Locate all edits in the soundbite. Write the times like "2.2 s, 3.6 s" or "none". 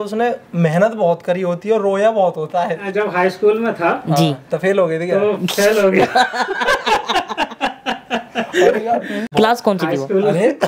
2.8 s, 9.3 s